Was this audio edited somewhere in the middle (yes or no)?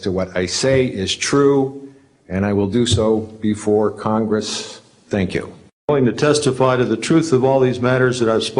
yes